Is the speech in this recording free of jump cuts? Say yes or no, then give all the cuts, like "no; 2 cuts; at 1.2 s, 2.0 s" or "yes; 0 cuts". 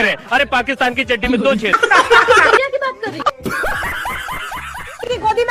no; 1 cut; at 2.6 s